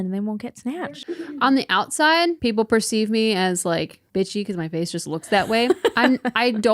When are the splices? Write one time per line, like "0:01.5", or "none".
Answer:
0:00.8
0:02.4
0:04.0